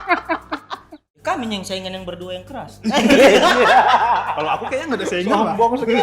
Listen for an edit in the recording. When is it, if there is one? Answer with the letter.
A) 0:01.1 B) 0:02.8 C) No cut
A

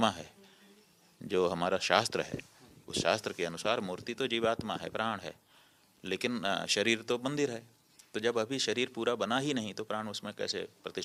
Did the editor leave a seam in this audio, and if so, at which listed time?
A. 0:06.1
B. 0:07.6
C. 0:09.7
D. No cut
D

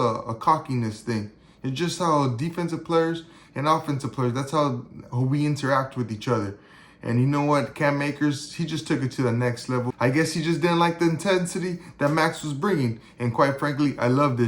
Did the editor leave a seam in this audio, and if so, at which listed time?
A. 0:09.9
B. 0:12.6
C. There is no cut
A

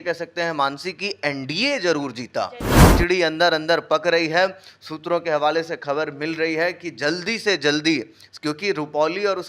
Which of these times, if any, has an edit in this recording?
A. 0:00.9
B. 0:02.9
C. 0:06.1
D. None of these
B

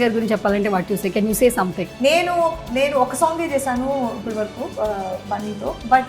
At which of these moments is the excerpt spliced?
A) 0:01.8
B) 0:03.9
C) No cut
A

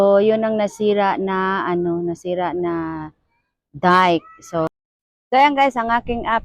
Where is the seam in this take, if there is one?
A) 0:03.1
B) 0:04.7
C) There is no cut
B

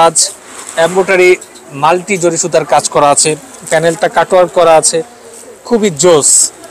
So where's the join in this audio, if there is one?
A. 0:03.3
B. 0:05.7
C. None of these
C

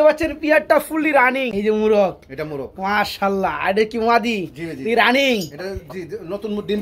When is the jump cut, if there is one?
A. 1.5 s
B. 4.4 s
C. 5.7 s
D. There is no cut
A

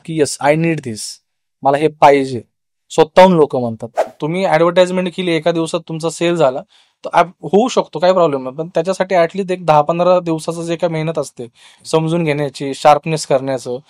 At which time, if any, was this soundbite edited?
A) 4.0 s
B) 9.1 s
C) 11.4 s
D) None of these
A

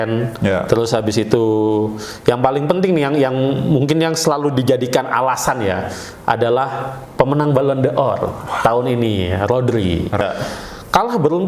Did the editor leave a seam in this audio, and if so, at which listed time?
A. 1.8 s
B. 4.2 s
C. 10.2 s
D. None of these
C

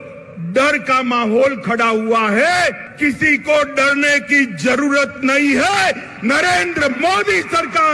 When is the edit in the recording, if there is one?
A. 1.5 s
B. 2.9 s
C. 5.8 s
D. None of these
B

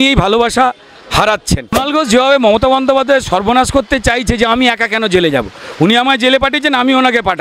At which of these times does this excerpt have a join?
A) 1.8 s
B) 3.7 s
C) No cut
A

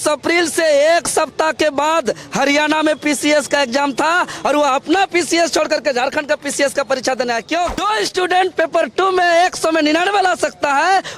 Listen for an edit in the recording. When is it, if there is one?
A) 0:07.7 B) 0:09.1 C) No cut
A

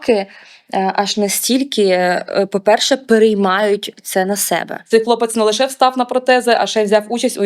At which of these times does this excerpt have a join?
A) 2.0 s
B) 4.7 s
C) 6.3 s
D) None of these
B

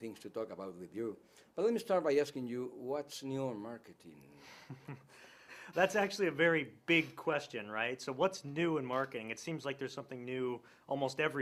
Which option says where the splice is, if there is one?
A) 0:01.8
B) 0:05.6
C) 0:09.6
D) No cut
A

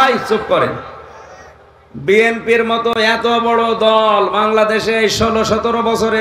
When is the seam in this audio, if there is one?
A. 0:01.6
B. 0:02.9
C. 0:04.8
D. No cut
B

